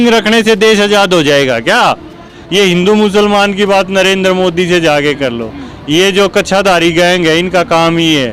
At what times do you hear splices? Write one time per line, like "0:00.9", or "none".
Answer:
0:02.4